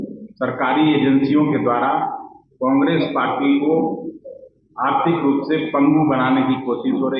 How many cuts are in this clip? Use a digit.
0